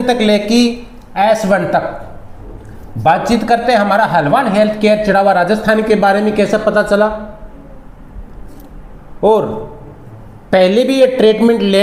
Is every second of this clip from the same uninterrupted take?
yes; 0 cuts

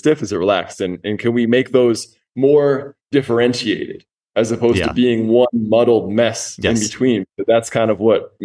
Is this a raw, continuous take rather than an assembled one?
yes; 0 cuts

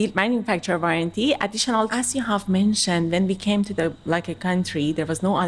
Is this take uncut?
no; 1 cut; at 1.9 s

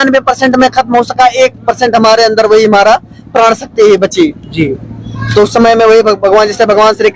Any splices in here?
no; 0 cuts

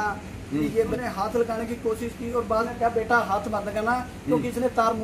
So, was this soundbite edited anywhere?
yes; 2 cuts; at 1.0 s, 2.7 s

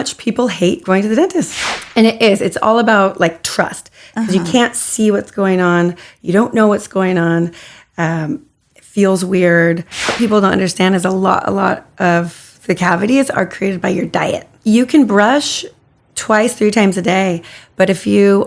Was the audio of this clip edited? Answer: yes; 3 cuts; at 1.6 s, 10.2 s, 14.5 s

